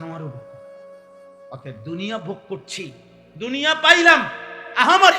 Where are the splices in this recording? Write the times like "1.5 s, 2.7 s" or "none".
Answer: none